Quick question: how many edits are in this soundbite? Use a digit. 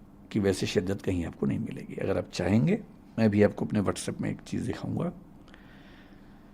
0